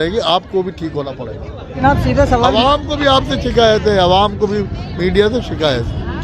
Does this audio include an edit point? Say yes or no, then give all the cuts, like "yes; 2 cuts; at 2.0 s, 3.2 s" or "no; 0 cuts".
yes; 1 cut; at 1.6 s